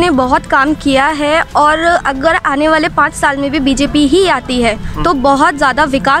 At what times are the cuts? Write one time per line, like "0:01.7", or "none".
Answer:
none